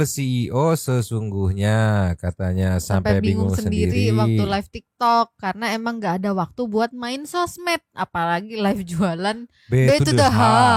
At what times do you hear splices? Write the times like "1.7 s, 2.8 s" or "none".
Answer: none